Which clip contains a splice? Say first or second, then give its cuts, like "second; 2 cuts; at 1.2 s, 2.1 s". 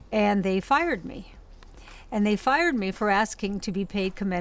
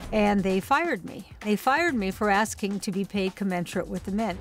second; 1 cut; at 1.5 s